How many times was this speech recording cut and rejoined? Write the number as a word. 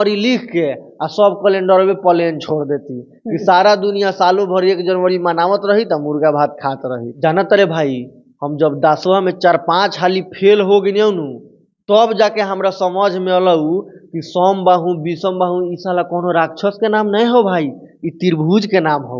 one